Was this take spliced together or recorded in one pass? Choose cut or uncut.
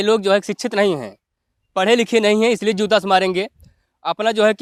uncut